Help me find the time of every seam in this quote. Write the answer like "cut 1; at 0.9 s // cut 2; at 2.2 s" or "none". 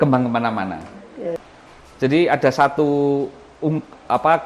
cut 1; at 1.4 s